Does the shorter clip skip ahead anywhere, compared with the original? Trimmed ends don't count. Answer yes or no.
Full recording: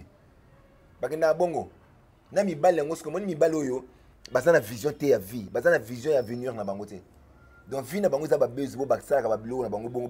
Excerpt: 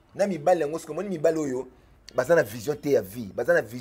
no